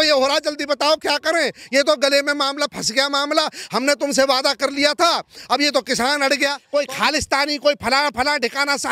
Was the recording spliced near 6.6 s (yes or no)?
yes